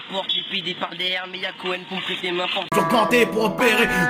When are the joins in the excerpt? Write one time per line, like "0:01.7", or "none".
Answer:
0:02.7